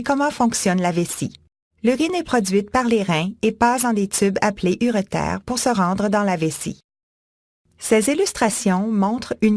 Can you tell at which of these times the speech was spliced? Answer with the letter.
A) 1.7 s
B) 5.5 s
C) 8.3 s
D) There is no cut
D